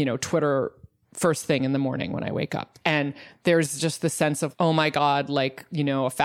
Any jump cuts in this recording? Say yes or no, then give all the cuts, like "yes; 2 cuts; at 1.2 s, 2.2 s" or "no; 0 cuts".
yes; 2 cuts; at 2.6 s, 4.5 s